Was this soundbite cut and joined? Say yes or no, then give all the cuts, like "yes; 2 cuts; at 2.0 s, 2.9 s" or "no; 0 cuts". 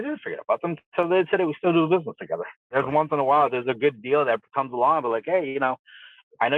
yes; 1 cut; at 2.7 s